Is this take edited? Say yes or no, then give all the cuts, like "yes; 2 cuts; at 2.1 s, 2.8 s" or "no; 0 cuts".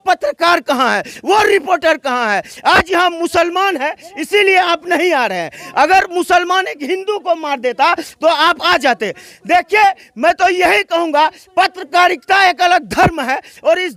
no; 0 cuts